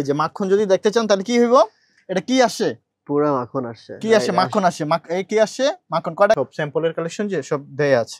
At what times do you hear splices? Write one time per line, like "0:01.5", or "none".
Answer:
0:06.4